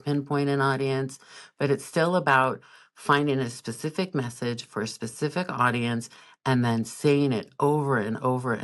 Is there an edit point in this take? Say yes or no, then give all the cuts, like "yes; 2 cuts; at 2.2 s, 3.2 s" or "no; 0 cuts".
no; 0 cuts